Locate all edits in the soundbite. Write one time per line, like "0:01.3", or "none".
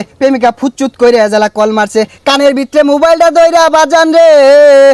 none